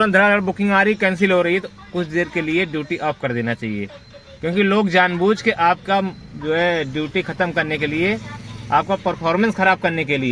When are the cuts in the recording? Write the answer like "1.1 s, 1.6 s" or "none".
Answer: none